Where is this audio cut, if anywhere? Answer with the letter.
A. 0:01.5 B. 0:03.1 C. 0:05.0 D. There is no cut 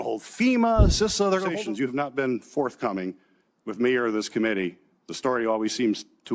A